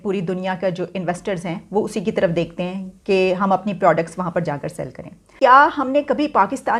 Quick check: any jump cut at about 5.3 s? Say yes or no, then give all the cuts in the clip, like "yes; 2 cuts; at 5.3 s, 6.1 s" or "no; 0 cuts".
yes; 1 cut; at 5.3 s